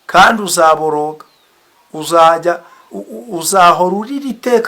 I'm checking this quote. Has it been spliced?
no; 0 cuts

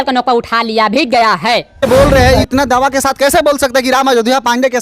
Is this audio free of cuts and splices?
no; 1 cut; at 1.8 s

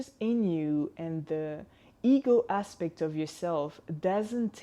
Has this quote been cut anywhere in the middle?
no; 0 cuts

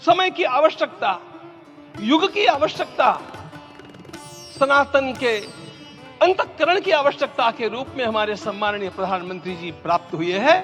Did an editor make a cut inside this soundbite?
no; 0 cuts

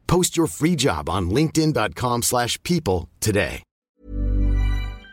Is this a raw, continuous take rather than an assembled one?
no; 1 cut; at 4.0 s

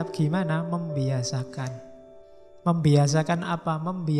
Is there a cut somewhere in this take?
yes; 1 cut; at 2.4 s

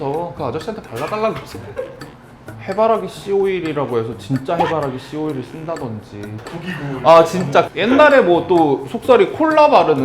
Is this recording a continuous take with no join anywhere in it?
no; 3 cuts; at 2.5 s, 6.4 s, 7.7 s

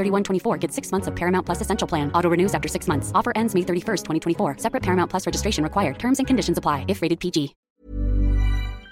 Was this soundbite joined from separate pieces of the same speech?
yes; 1 cut; at 7.7 s

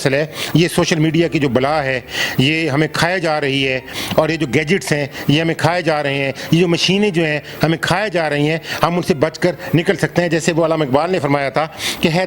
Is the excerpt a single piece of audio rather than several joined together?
yes; 0 cuts

